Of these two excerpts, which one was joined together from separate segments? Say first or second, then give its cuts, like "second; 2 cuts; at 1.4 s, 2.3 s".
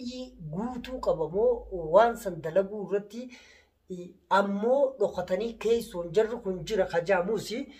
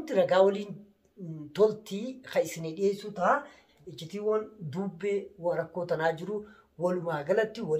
second; 1 cut; at 3.7 s